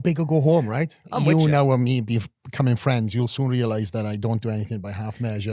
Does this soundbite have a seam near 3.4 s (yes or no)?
no